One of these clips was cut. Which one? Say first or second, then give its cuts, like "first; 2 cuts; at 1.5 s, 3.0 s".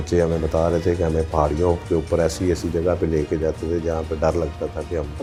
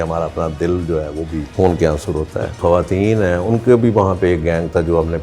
second; 2 cuts; at 1.5 s, 2.6 s